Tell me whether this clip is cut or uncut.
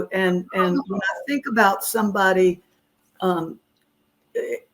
uncut